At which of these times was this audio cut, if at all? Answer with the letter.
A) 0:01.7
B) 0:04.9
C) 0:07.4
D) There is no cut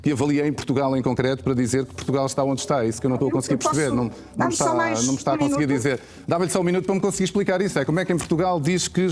B